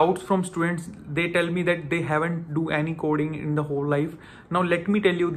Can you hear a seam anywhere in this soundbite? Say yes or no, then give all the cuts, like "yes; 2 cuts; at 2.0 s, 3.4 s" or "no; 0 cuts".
no; 0 cuts